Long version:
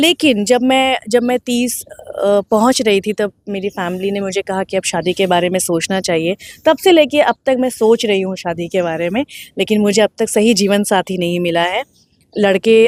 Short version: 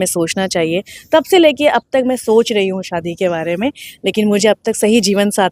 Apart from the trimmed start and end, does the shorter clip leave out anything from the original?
no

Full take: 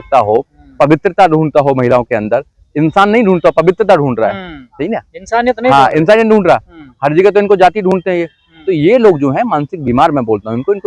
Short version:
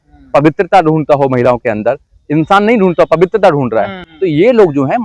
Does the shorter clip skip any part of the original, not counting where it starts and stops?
yes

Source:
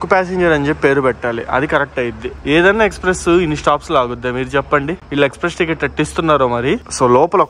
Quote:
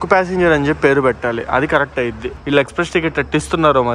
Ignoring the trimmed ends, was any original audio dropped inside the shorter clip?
yes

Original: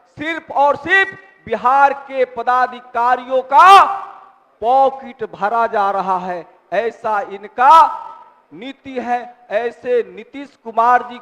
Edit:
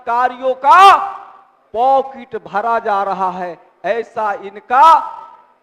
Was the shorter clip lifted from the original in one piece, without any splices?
yes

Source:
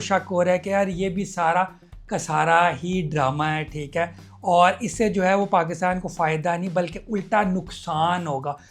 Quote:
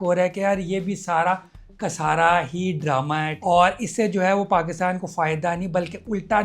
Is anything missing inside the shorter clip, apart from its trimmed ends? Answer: yes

